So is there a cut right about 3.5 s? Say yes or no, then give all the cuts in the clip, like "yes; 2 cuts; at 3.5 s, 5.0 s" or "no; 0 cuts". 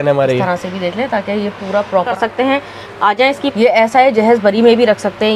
yes; 2 cuts; at 2.1 s, 3.5 s